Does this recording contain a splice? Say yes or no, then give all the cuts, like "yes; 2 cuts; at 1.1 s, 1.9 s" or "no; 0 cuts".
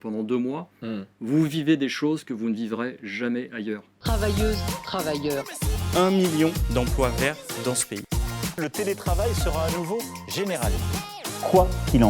yes; 1 cut; at 3.9 s